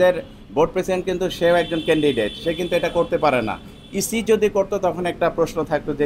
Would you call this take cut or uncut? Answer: uncut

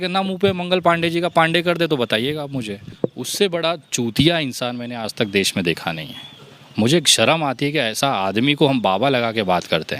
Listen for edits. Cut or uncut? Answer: cut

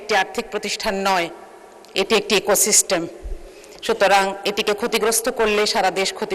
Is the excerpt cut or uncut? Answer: uncut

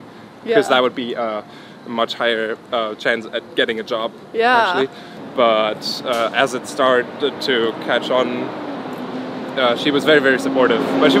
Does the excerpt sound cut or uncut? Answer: uncut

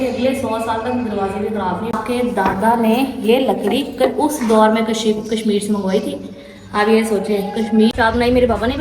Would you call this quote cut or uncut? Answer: cut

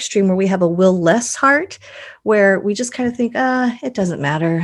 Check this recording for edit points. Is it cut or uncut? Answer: uncut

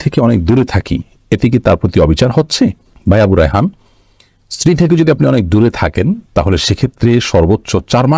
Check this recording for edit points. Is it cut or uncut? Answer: uncut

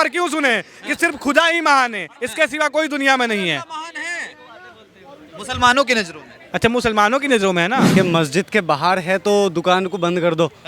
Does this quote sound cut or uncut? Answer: cut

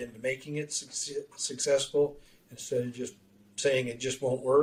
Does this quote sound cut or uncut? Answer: uncut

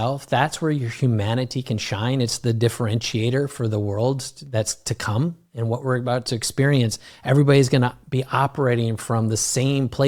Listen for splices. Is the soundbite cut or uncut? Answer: uncut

